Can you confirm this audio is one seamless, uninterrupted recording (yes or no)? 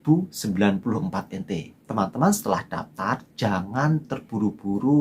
no